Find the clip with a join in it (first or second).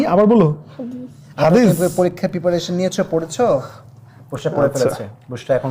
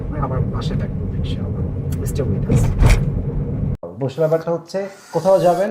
second